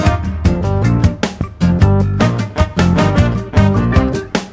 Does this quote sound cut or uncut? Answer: uncut